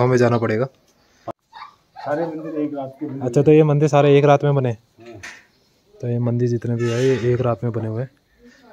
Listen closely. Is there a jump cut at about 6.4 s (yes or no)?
no